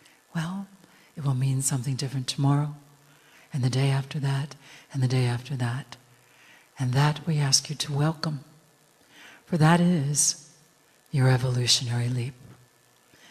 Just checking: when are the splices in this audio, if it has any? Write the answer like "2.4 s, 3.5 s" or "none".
9.6 s